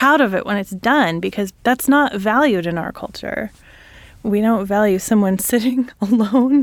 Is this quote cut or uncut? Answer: cut